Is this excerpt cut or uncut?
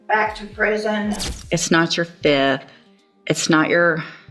cut